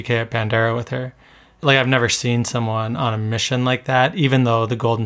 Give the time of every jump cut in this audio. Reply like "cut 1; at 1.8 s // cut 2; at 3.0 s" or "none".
cut 1; at 1.6 s